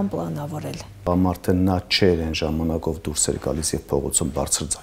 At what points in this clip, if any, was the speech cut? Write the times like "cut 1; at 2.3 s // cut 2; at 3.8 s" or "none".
cut 1; at 1.1 s

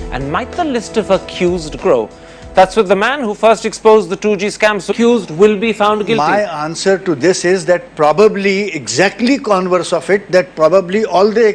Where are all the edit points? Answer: none

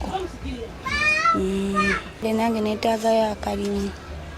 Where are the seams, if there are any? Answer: cut 1; at 2.2 s

